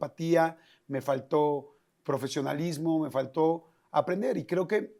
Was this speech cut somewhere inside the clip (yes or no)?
no